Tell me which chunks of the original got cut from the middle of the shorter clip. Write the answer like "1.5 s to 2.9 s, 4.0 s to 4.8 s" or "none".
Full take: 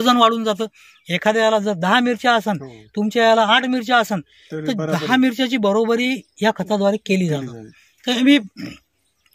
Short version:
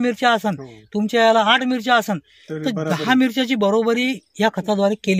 none